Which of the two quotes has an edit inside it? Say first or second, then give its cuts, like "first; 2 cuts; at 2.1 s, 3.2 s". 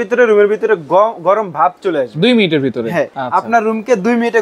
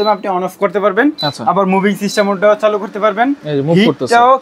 first; 1 cut; at 3.1 s